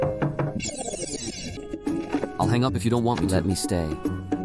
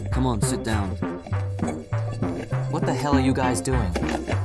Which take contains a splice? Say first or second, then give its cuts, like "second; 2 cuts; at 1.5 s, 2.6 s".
first; 1 cut; at 1.6 s